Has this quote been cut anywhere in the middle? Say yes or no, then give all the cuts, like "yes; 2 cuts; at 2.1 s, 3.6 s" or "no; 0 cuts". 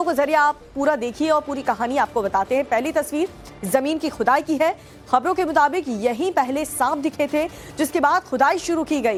no; 0 cuts